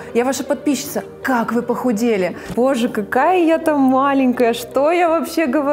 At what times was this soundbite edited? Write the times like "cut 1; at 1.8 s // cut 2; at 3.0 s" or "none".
cut 1; at 2.5 s